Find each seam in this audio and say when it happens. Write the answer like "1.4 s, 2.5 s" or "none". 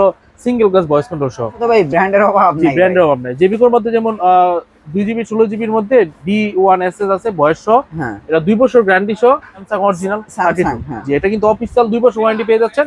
1.6 s, 9.6 s

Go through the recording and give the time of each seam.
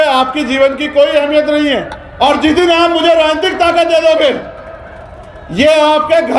2.0 s

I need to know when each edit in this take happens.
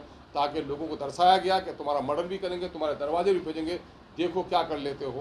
none

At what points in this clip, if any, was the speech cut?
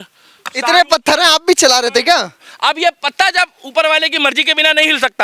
2.4 s

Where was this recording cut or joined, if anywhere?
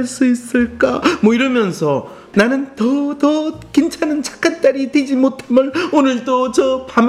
2.2 s

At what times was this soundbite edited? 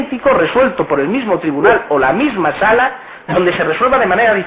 none

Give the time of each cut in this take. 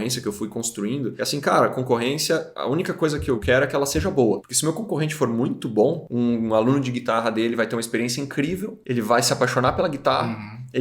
1.1 s, 2.5 s, 3.4 s, 4.5 s, 6.0 s, 8.7 s

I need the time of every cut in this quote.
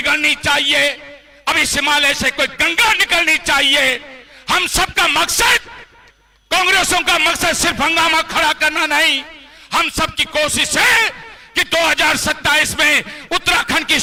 none

